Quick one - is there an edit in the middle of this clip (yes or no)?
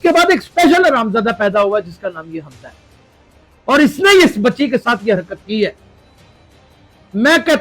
no